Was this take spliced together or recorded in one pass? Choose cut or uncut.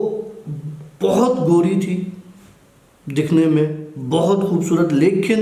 uncut